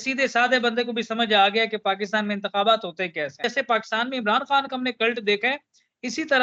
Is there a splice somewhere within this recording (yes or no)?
yes